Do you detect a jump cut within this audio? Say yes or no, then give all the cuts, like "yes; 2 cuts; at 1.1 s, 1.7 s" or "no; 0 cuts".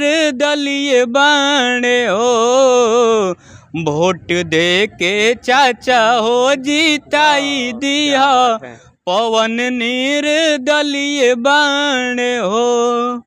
no; 0 cuts